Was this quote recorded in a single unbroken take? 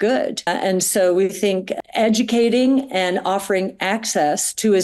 yes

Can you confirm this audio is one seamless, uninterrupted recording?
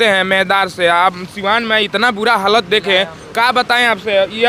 yes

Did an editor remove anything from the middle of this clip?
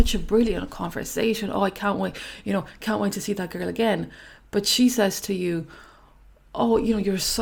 no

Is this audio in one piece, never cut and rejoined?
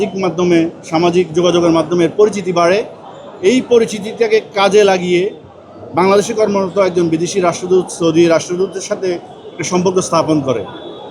yes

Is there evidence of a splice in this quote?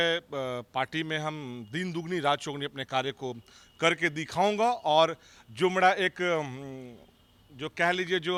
no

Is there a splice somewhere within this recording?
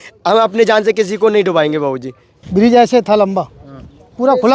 yes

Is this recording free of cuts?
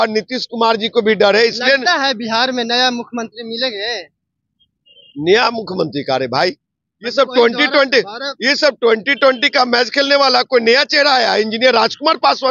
yes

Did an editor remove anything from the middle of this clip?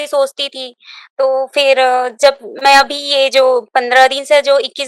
no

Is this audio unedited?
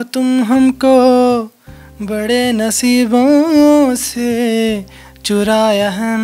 yes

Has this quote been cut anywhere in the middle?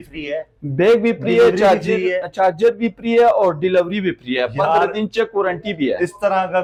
no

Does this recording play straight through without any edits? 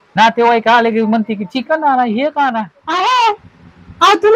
no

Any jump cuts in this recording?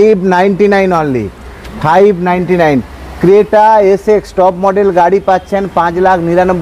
no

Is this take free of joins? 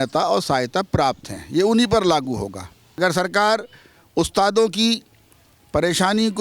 no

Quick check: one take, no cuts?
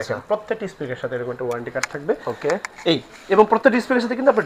yes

